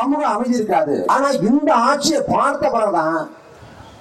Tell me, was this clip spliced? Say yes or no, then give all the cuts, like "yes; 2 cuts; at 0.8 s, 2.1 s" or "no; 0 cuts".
yes; 1 cut; at 1.0 s